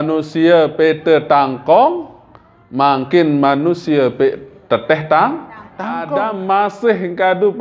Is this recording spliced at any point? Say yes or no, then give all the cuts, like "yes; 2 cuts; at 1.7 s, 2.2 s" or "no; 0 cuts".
yes; 1 cut; at 6.0 s